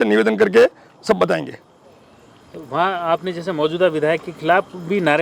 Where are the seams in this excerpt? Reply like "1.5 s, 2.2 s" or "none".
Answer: none